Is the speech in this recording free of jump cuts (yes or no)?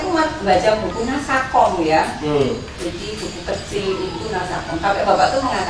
yes